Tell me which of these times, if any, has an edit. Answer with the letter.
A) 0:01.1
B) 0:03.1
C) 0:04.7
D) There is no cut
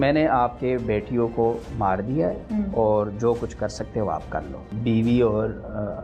C